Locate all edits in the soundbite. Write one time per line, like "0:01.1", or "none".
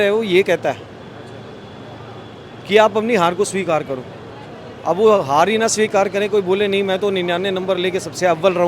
none